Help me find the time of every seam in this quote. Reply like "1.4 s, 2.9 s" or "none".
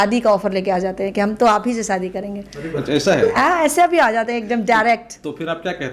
none